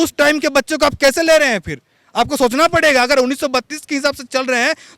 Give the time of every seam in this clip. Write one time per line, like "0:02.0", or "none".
none